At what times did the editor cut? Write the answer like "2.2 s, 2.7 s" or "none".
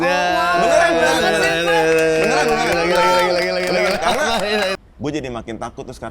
4.8 s

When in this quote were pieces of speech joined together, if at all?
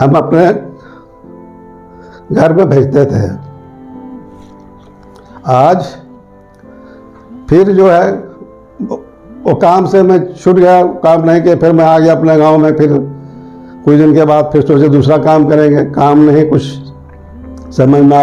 none

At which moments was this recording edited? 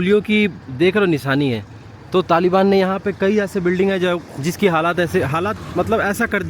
none

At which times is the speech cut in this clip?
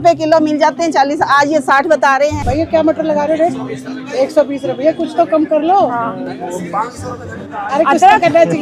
2.4 s

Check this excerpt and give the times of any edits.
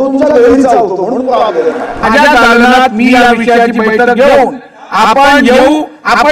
1.9 s

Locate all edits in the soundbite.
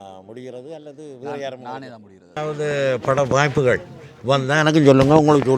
2.4 s

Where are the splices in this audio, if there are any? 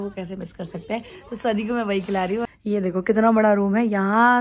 2.5 s

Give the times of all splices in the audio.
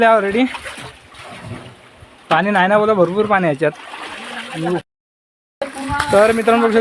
4.9 s

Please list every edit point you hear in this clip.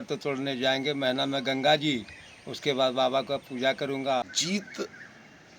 4.3 s

